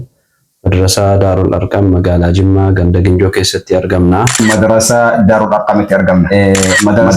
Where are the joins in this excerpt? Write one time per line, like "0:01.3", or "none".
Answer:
0:04.4
0:06.3